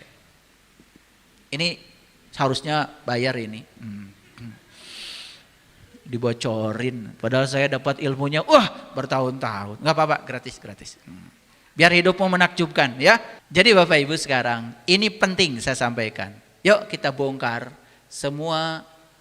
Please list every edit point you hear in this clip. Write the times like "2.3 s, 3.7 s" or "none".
13.4 s